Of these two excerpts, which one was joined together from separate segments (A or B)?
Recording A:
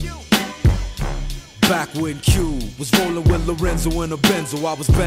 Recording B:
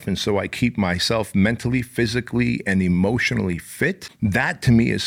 B